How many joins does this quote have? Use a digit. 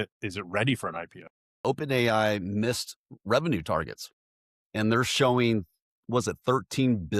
1